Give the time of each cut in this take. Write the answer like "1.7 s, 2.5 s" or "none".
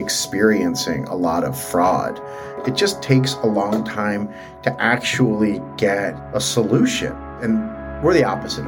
2.6 s, 6.2 s, 7.3 s